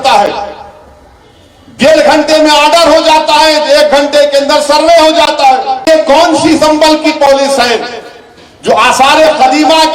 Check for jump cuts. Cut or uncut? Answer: cut